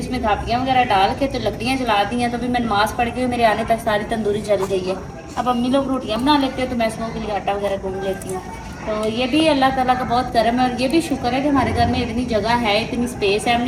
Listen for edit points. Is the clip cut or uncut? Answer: uncut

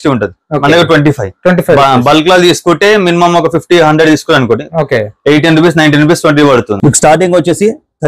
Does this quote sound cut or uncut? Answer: cut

